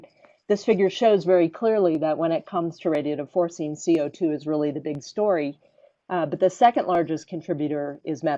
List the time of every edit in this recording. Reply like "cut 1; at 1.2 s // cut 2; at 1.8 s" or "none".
cut 1; at 3.8 s